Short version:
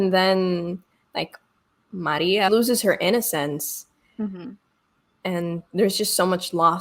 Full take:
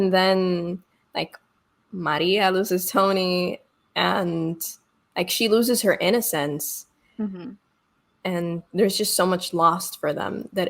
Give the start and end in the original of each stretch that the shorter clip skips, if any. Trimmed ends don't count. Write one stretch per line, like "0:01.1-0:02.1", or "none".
0:02.5-0:05.5